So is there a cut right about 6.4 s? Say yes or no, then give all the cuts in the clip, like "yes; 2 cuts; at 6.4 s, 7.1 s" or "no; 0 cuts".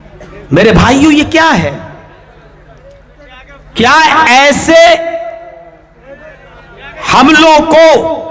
no; 1 cut; at 3.5 s